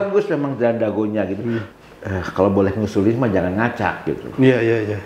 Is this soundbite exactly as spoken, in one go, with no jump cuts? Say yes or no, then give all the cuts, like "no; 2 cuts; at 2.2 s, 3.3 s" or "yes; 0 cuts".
no; 1 cut; at 1.7 s